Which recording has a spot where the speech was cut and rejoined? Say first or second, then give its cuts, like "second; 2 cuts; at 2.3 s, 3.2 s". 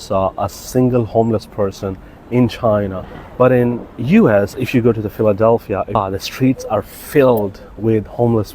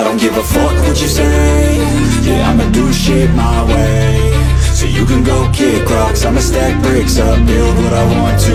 first; 1 cut; at 6.0 s